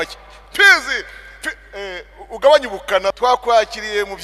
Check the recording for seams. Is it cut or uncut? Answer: cut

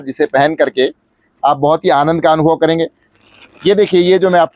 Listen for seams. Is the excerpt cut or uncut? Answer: cut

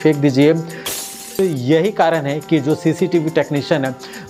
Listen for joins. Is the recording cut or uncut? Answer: cut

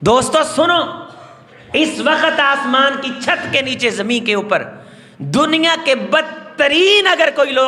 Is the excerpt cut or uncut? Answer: uncut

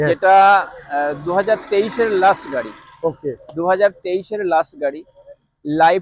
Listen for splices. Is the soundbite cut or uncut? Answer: uncut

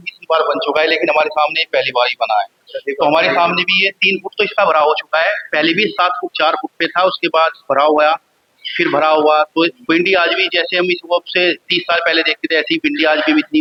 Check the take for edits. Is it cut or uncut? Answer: uncut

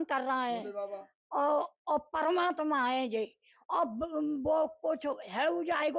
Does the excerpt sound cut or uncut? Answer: uncut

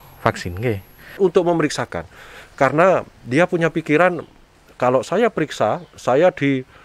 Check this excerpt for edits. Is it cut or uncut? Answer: cut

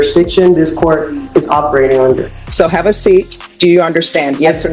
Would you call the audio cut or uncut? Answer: cut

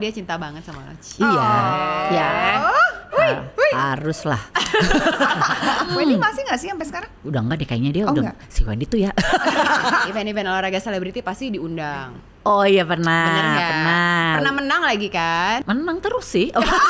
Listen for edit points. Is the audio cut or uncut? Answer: cut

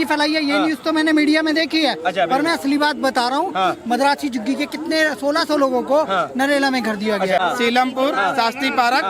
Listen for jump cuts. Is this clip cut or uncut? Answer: cut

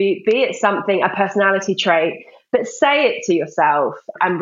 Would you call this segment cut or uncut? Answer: uncut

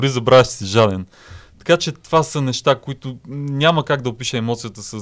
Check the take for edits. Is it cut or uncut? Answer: uncut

